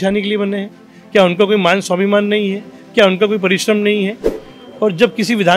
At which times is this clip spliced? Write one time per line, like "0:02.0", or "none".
0:04.3